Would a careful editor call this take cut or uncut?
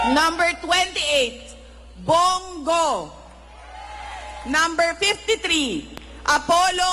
uncut